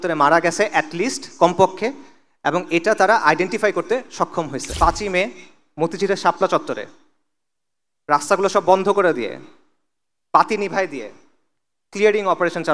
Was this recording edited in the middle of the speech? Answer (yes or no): yes